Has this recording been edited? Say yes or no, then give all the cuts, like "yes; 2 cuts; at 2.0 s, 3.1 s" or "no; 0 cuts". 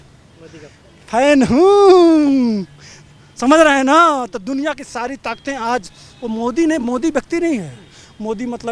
no; 0 cuts